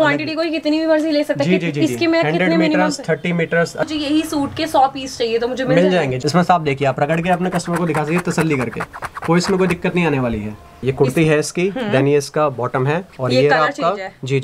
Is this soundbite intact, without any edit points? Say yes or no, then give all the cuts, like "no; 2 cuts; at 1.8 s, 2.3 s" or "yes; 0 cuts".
no; 3 cuts; at 3.9 s, 6.2 s, 10.7 s